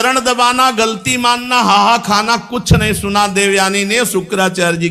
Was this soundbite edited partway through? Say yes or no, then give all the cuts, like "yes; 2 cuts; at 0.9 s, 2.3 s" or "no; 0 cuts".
no; 0 cuts